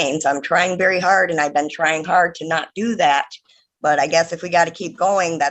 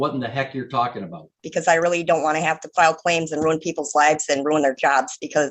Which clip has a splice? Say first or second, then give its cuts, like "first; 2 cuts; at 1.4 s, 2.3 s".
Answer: second; 1 cut; at 1.4 s